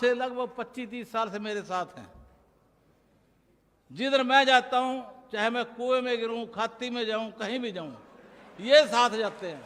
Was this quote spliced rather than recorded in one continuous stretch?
no; 0 cuts

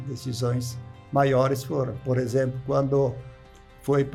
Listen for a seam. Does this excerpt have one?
no; 0 cuts

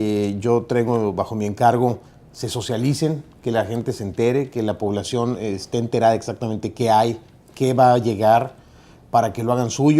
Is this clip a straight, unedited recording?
no; 1 cut; at 5.8 s

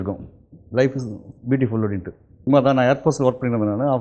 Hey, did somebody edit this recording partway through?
yes; 1 cut; at 2.5 s

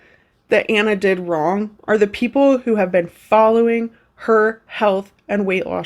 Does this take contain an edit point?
no; 0 cuts

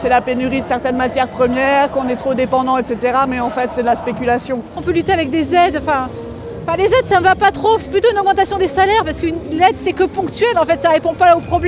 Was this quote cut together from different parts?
yes; 1 cut; at 4.8 s

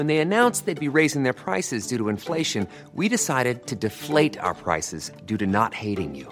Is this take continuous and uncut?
yes; 0 cuts

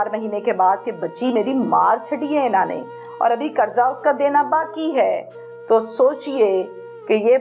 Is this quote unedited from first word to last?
yes; 0 cuts

